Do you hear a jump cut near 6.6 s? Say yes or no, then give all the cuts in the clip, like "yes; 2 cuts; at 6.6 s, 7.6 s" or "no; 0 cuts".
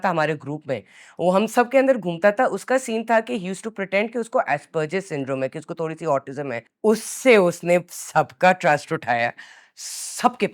yes; 1 cut; at 6.6 s